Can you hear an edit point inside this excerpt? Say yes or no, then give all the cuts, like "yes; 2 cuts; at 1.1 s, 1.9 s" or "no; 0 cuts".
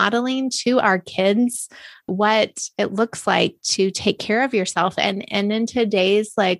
yes; 1 cut; at 2.1 s